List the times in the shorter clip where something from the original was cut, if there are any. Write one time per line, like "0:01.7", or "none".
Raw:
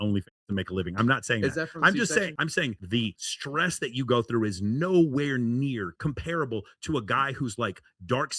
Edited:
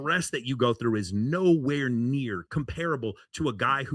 none